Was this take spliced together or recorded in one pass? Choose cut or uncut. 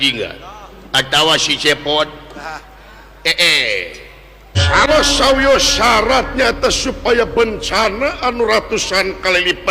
cut